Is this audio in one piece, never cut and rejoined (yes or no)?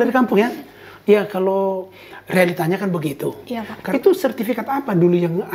no